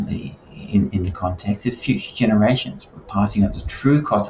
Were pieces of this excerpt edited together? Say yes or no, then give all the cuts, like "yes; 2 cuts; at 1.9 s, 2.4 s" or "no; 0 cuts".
no; 0 cuts